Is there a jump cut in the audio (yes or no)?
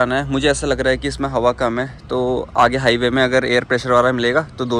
no